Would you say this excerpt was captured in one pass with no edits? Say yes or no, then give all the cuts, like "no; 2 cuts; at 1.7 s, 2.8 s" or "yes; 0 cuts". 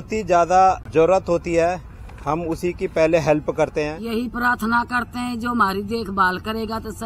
no; 2 cuts; at 0.9 s, 4.0 s